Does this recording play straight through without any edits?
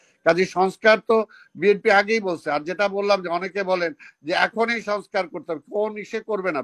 yes; 0 cuts

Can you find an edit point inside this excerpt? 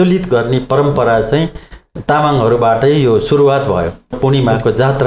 yes; 1 cut; at 4.2 s

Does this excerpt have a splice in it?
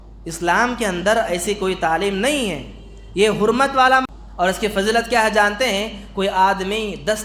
yes; 1 cut; at 4.1 s

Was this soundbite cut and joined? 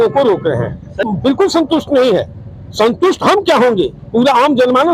yes; 1 cut; at 1.0 s

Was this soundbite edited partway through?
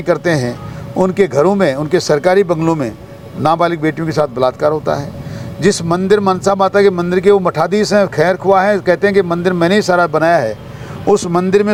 no; 0 cuts

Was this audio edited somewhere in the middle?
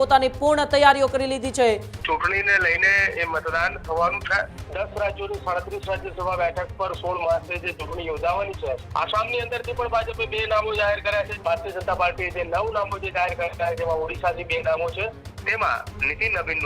yes; 5 cuts; at 1.9 s, 4.6 s, 8.8 s, 11.3 s, 15.3 s

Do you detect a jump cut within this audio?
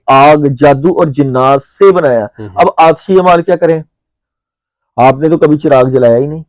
no; 0 cuts

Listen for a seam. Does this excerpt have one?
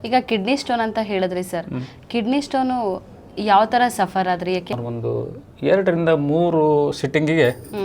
yes; 1 cut; at 4.7 s

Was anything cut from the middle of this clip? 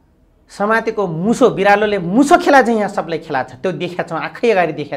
no; 0 cuts

